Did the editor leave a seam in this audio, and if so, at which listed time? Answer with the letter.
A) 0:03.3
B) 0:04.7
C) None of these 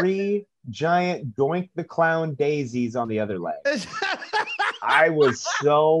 A